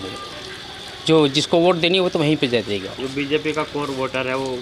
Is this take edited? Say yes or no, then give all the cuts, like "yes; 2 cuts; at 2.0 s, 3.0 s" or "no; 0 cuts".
no; 0 cuts